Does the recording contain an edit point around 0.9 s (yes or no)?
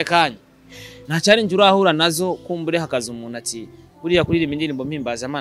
yes